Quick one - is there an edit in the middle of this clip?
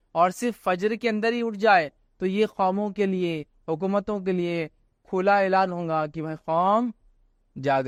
no; 0 cuts

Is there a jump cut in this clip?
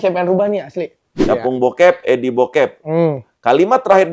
yes; 1 cut; at 1.2 s

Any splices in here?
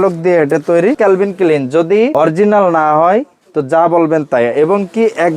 yes; 2 cuts; at 1.0 s, 2.1 s

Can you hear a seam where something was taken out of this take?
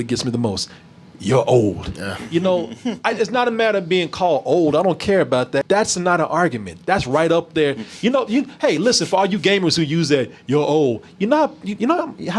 yes; 1 cut; at 5.6 s

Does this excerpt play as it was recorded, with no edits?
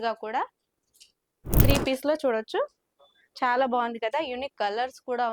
no; 1 cut; at 1.6 s

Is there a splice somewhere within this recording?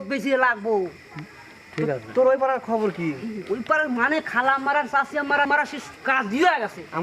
yes; 1 cut; at 5.5 s

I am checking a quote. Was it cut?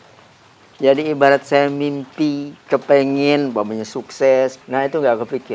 yes; 1 cut; at 4.6 s

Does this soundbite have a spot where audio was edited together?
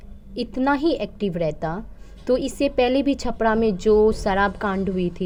no; 0 cuts

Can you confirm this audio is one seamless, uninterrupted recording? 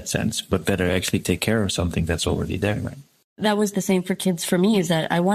no; 1 cut; at 3.4 s

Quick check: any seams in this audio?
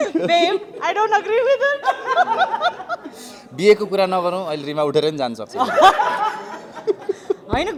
no; 0 cuts

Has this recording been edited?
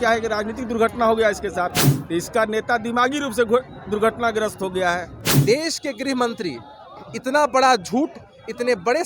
yes; 2 cuts; at 1.9 s, 5.3 s

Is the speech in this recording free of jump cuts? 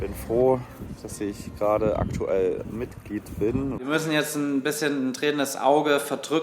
no; 1 cut; at 3.8 s

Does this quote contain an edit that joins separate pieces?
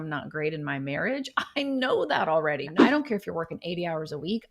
yes; 1 cut; at 2.7 s

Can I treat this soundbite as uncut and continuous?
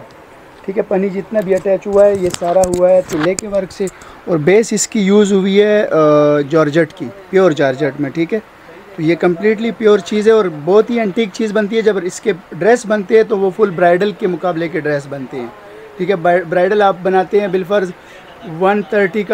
yes; 0 cuts

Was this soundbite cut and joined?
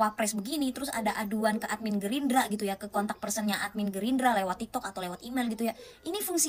no; 0 cuts

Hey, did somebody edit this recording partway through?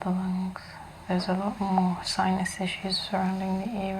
yes; 1 cut; at 1.0 s

